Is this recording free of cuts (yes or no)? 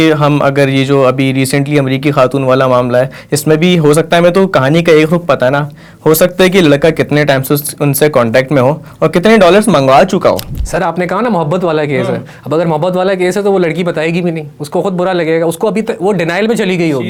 yes